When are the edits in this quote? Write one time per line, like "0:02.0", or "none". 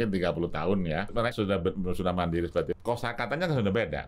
0:01.3
0:02.8